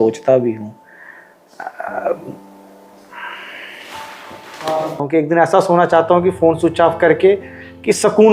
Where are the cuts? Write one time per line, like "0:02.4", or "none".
0:05.0

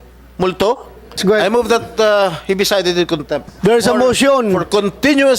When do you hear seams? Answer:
0:01.2
0:03.5

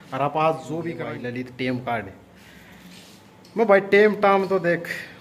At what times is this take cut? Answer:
0:01.0

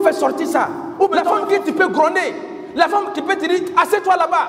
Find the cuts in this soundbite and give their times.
0:01.2

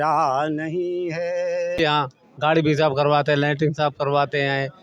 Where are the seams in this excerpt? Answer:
0:01.8

